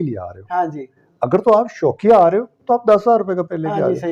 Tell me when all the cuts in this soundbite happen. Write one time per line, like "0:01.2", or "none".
none